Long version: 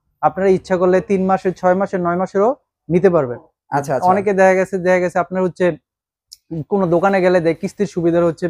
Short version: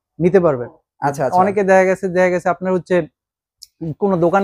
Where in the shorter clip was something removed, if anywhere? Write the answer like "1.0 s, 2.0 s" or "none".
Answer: none